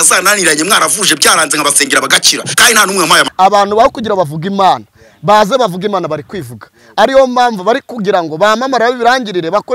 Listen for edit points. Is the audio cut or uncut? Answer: cut